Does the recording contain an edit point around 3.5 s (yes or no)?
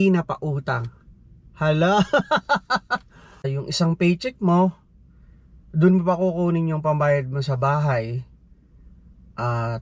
yes